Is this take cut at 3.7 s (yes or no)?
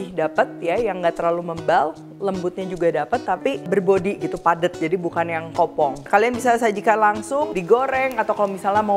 yes